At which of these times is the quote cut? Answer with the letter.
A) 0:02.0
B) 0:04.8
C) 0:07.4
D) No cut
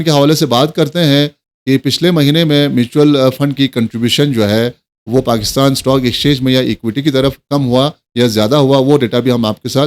D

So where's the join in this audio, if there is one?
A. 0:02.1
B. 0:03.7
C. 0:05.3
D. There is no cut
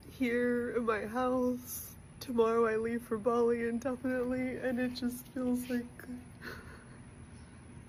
D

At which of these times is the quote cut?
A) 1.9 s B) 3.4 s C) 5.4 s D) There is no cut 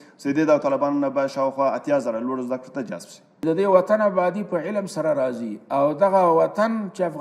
B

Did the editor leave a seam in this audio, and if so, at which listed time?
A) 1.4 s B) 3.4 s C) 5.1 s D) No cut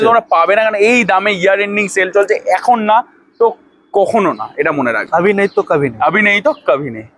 D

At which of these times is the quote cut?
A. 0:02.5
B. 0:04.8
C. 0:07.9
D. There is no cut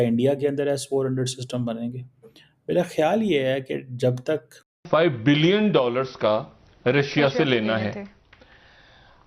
B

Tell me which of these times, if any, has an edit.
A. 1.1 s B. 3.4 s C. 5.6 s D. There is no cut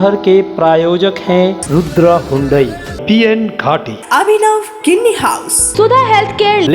C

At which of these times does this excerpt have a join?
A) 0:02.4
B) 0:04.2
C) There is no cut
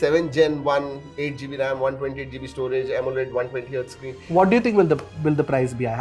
B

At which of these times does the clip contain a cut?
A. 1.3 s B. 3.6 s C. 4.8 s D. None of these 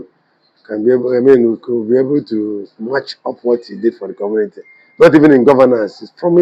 D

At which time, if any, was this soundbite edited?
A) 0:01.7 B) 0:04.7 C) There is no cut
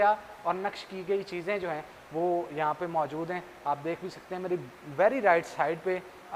C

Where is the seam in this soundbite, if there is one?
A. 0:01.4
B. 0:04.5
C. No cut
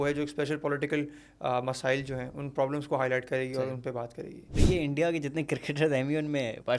B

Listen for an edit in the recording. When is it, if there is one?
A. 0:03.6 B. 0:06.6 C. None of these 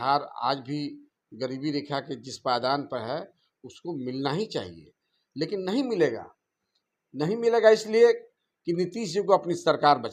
C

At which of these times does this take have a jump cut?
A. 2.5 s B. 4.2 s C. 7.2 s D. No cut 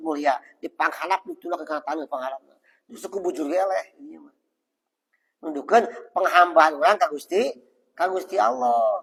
D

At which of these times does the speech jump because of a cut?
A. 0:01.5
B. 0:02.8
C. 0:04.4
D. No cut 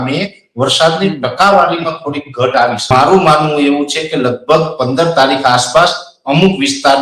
B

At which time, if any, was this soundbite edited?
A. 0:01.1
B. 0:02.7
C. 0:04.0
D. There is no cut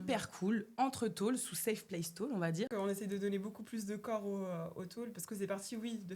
B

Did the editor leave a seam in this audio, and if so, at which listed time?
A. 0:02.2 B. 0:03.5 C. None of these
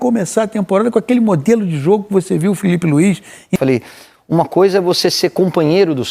B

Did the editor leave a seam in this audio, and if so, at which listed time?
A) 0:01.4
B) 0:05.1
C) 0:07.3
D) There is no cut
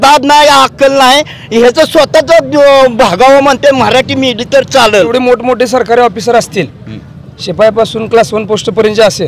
B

